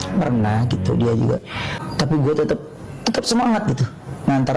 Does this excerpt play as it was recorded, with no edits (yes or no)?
no